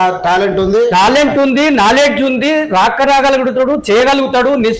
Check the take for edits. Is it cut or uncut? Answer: uncut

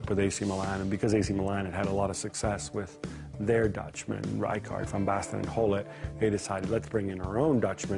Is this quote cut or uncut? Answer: cut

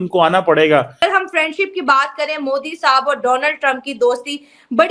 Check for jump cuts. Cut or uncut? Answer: cut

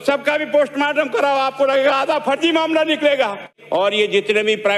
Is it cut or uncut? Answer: cut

